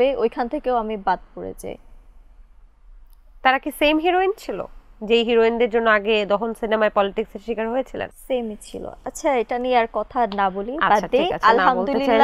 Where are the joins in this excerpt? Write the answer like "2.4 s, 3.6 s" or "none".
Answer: none